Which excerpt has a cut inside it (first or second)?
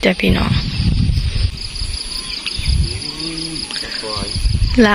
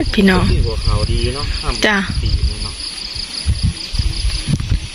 first